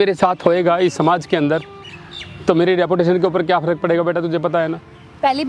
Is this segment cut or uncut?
uncut